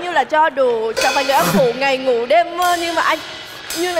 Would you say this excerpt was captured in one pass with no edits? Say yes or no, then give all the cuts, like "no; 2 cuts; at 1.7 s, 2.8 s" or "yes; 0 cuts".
yes; 0 cuts